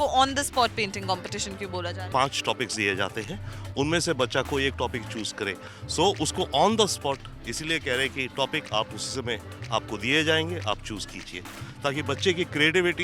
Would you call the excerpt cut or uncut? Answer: cut